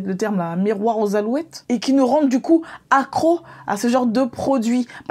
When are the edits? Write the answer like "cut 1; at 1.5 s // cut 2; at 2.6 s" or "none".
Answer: cut 1; at 1.6 s